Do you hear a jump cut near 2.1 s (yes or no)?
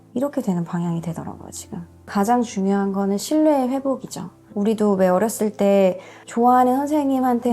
yes